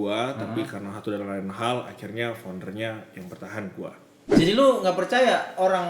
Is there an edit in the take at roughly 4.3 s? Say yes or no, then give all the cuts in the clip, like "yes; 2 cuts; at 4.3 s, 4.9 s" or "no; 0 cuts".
yes; 1 cut; at 4.3 s